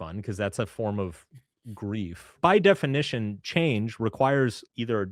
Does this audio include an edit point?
yes; 1 cut; at 2.4 s

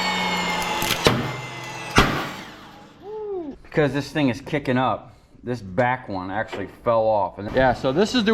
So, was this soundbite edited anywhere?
yes; 2 cuts; at 3.6 s, 7.4 s

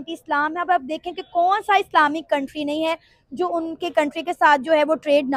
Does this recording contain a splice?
no; 0 cuts

